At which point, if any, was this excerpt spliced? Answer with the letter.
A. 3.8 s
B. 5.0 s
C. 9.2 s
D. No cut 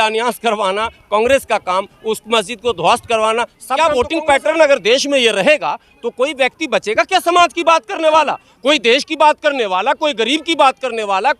A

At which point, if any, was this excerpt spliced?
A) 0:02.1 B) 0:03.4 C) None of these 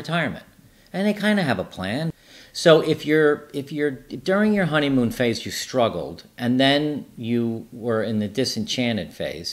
A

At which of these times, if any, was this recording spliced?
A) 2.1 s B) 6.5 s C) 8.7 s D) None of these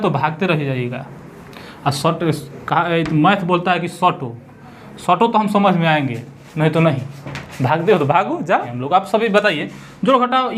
C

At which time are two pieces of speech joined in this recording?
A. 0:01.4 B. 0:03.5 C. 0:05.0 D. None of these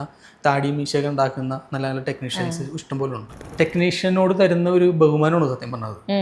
B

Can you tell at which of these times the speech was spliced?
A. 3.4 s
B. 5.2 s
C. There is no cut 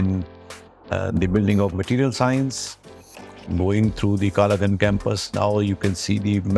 A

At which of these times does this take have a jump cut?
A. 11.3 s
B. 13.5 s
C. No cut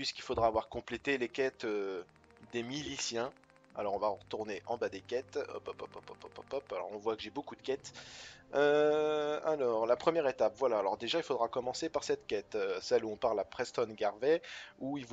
B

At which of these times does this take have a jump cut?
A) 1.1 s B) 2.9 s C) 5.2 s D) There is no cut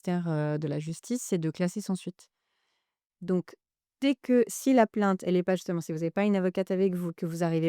D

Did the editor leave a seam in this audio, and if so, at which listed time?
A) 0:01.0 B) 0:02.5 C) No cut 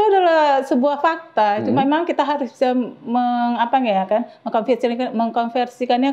C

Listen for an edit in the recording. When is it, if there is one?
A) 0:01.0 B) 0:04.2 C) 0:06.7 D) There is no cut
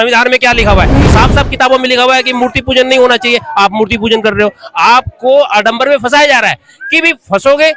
A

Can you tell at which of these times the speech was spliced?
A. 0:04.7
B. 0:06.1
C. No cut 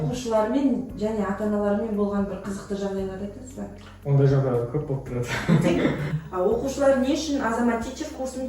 B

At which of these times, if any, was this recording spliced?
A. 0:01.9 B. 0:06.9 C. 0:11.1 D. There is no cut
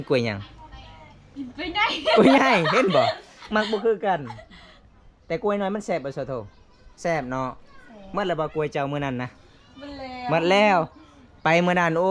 D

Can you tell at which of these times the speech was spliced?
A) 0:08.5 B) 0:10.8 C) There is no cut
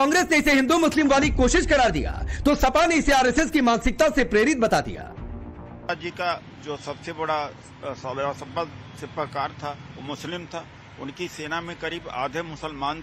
B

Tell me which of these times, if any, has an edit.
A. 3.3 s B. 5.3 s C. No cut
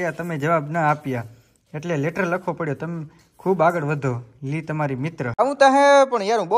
B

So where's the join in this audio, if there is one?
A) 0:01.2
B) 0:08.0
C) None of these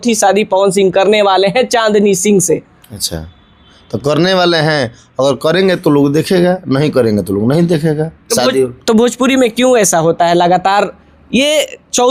C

